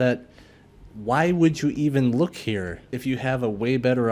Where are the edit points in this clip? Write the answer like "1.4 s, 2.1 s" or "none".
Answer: 2.9 s